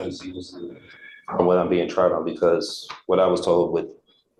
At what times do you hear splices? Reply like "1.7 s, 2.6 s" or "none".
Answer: none